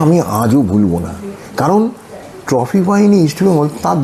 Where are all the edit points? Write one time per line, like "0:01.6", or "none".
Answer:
none

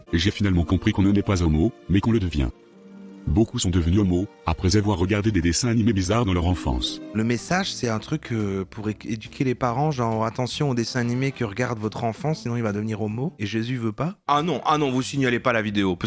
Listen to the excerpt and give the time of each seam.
0:14.2

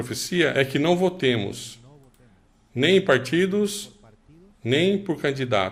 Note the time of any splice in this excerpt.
none

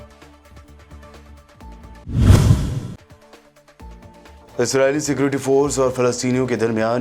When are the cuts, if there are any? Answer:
0:01.9

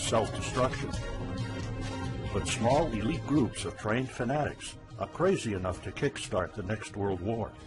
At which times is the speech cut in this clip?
none

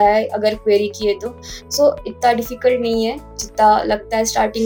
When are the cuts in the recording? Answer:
none

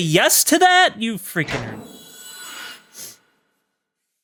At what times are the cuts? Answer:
none

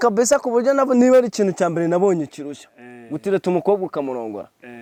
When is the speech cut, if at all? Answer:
none

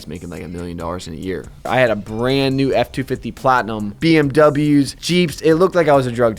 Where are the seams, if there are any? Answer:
0:01.7
0:03.8
0:05.0

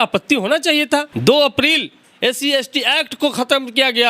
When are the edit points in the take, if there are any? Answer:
0:01.1

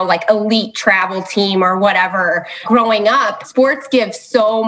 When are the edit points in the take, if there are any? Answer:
0:03.4

